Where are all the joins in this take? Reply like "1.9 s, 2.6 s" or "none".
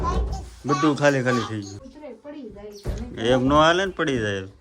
1.8 s